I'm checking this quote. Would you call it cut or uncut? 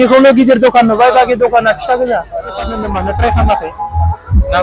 cut